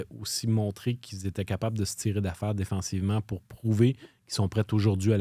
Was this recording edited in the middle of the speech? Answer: no; 0 cuts

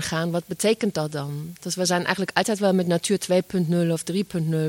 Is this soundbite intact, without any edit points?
yes; 0 cuts

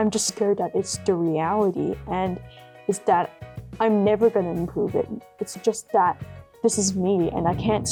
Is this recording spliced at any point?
no; 0 cuts

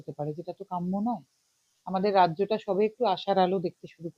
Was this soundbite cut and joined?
yes; 1 cut; at 1.7 s

